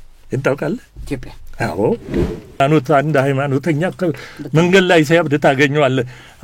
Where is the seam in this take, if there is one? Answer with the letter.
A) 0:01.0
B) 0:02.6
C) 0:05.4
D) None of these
B